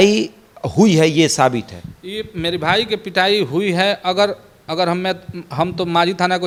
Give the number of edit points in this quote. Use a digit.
0